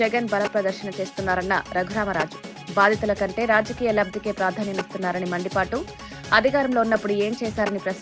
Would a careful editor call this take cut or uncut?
uncut